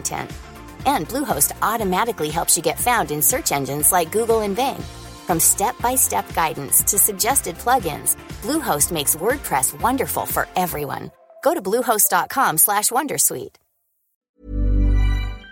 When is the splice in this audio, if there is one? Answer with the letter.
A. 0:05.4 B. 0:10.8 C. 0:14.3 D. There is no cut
C